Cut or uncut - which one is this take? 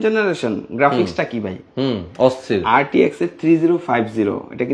uncut